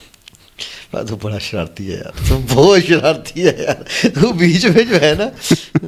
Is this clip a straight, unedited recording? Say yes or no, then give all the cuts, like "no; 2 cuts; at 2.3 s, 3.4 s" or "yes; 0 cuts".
yes; 0 cuts